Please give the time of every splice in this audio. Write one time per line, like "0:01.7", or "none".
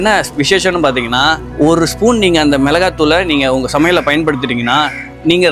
0:01.5